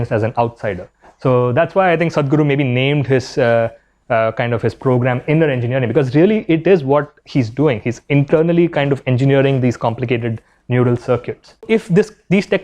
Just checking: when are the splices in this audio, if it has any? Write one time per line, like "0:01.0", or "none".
0:11.6